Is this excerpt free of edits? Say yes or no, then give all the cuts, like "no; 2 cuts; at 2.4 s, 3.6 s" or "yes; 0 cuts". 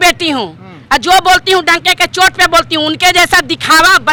yes; 0 cuts